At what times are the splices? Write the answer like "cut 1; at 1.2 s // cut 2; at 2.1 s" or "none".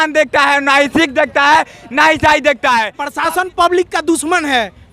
cut 1; at 3.0 s